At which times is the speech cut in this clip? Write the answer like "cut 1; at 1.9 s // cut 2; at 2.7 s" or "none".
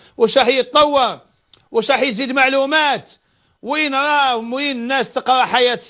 none